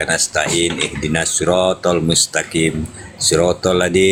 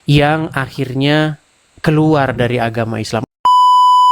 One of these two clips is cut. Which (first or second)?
second